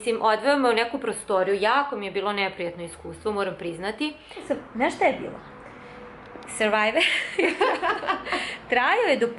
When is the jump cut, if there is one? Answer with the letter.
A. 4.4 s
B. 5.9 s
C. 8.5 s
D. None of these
A